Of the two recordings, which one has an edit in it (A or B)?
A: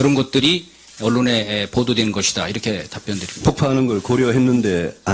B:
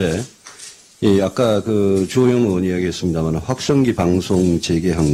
A